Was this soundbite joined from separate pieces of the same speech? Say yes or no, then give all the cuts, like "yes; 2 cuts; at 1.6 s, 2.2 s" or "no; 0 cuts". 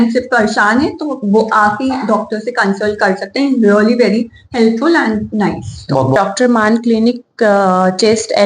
yes; 1 cut; at 6.2 s